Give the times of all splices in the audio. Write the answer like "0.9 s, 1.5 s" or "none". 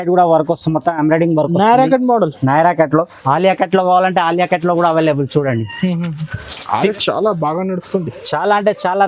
3.2 s, 6.9 s